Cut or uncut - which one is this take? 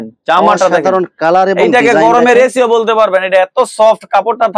uncut